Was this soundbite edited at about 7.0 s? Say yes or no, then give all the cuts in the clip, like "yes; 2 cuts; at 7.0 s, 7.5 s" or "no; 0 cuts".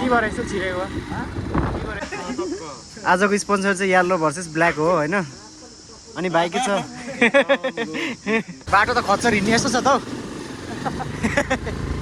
no; 2 cuts; at 2.0 s, 8.6 s